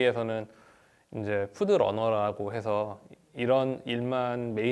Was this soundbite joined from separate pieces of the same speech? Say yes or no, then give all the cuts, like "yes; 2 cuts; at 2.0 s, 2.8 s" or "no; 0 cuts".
no; 0 cuts